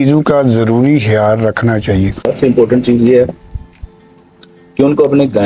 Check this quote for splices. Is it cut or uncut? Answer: uncut